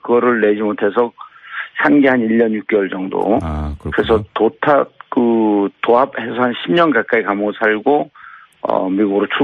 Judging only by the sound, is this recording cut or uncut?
uncut